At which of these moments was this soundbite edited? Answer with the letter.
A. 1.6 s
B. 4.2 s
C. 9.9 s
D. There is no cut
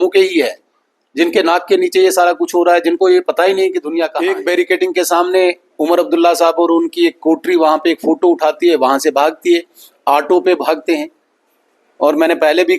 B